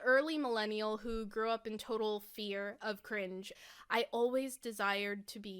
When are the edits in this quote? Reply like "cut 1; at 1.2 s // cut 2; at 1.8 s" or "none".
cut 1; at 3.5 s